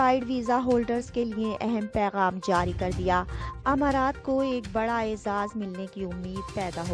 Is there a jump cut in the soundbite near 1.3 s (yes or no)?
no